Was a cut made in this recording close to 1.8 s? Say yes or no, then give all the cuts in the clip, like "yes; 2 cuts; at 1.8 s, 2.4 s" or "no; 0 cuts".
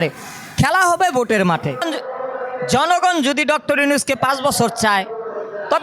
yes; 1 cut; at 1.8 s